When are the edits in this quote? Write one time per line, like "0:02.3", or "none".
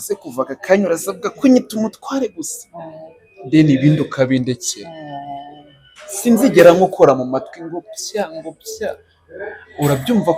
none